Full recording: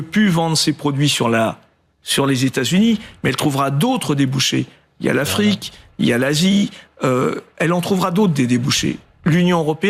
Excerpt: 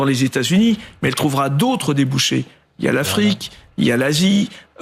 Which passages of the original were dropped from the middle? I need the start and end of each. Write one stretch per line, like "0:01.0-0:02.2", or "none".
none